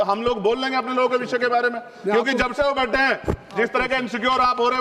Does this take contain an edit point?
no; 0 cuts

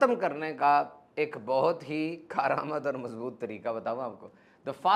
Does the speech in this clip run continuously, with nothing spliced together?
yes; 0 cuts

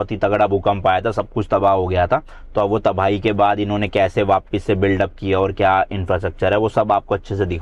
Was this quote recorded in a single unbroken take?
yes; 0 cuts

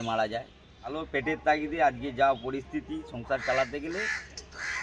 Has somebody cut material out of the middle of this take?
yes; 1 cut; at 0.9 s

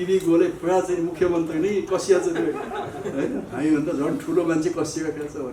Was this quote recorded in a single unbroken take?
yes; 0 cuts

